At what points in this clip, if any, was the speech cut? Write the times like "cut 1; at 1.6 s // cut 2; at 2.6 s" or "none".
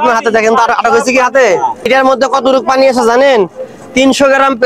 cut 1; at 1.9 s